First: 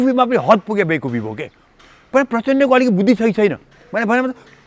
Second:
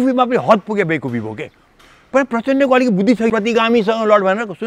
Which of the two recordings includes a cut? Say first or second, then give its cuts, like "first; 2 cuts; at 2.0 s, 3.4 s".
second; 1 cut; at 3.3 s